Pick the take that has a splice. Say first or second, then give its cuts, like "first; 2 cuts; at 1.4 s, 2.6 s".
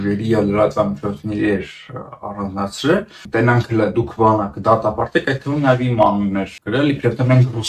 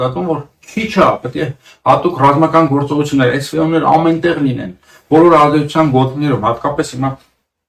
first; 2 cuts; at 3.2 s, 6.6 s